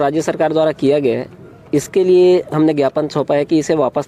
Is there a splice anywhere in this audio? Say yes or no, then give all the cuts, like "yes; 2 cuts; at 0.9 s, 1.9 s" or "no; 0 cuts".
no; 0 cuts